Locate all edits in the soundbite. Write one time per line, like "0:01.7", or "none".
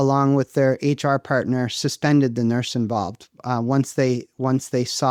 none